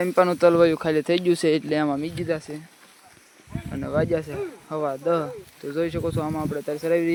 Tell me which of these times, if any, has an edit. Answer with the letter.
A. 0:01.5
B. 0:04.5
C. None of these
C